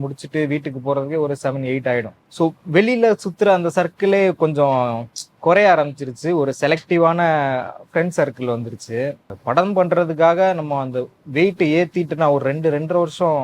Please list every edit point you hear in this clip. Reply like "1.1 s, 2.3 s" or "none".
2.2 s, 9.3 s